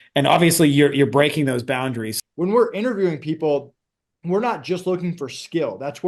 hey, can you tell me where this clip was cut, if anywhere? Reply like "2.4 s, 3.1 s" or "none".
2.1 s